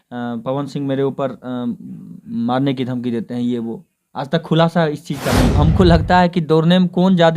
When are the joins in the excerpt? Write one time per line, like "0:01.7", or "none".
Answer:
0:05.5